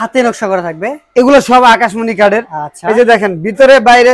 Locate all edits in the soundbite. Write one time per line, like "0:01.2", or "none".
none